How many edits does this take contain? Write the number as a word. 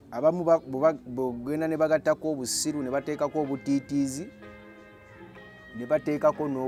zero